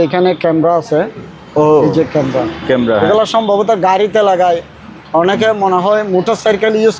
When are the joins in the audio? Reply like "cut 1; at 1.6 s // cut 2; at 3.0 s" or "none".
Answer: none